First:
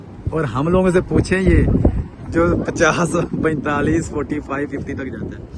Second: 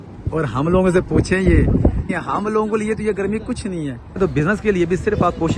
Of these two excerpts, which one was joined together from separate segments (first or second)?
second